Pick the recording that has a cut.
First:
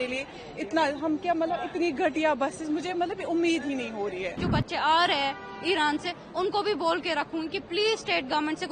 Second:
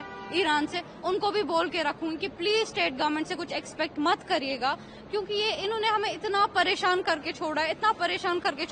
first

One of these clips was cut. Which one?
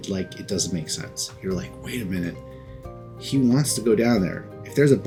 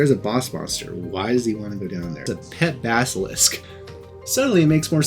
second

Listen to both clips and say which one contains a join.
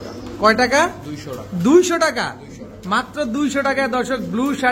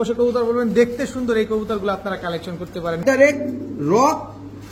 second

